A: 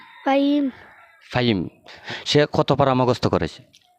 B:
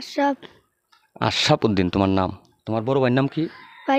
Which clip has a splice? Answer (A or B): A